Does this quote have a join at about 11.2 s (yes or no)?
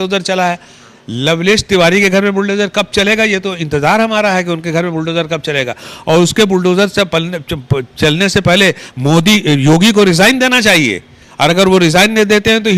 no